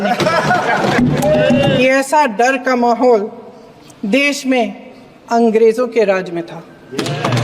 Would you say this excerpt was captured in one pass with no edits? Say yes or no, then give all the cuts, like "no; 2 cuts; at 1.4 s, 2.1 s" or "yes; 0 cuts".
no; 1 cut; at 1.7 s